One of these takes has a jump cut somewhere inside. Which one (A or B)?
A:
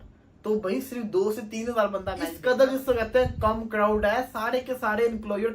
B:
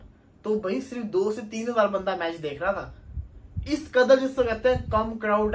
A